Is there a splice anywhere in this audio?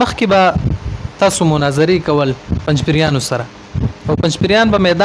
no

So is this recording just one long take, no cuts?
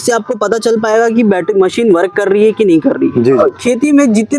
no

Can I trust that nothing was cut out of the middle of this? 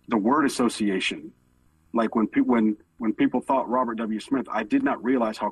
no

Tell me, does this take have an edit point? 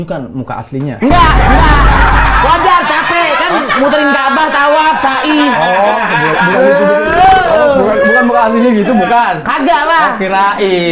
no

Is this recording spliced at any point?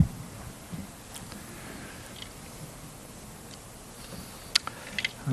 no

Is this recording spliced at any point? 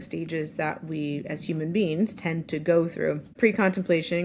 yes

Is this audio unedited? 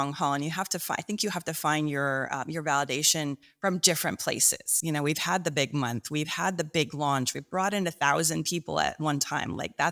no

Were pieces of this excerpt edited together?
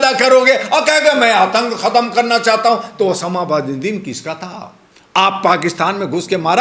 no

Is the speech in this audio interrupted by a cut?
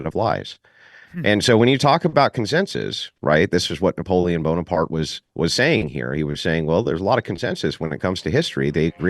no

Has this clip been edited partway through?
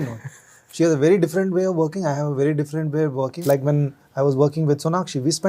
yes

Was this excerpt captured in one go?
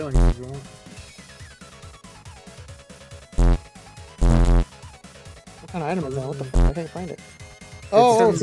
yes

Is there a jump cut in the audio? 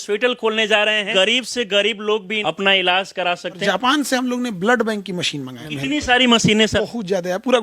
yes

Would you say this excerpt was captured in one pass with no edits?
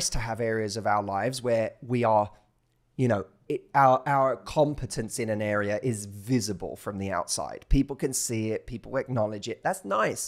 yes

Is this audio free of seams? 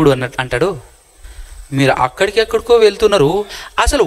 yes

